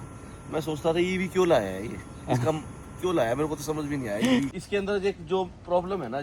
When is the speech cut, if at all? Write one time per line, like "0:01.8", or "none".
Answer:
0:04.5